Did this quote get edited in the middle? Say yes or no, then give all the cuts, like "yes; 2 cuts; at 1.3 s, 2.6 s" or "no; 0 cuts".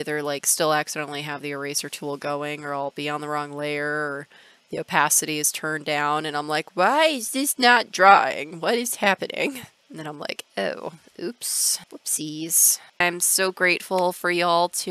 no; 0 cuts